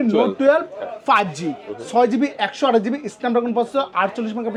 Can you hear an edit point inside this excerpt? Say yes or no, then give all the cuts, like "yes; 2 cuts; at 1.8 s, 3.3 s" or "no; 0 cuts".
no; 0 cuts